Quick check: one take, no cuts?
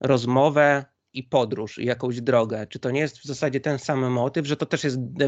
yes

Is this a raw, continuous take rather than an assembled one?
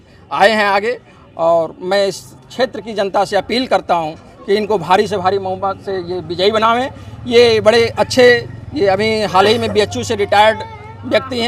yes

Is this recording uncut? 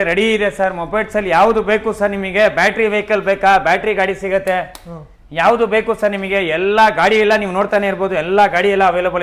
yes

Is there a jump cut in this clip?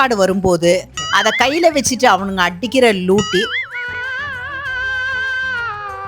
no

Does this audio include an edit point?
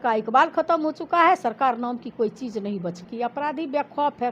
yes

